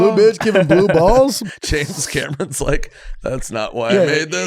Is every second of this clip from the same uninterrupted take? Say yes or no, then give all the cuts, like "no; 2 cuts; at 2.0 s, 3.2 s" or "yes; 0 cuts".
no; 1 cut; at 1.4 s